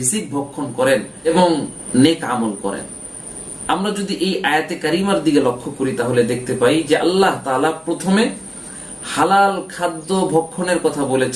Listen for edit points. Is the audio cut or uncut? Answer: uncut